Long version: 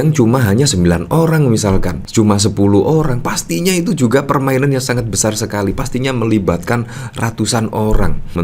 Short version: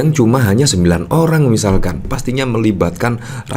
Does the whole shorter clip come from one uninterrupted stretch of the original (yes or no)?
no